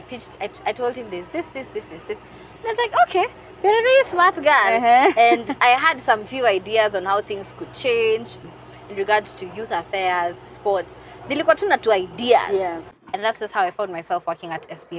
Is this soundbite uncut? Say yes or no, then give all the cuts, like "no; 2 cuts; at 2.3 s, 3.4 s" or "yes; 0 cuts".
no; 2 cuts; at 8.4 s, 12.8 s